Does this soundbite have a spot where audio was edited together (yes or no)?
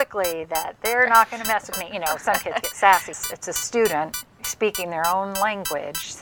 yes